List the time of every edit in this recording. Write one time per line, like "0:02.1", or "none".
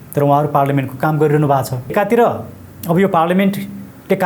0:01.9